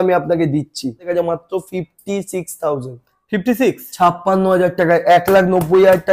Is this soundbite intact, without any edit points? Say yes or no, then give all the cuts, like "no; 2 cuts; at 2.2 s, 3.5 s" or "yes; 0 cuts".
no; 1 cut; at 1.1 s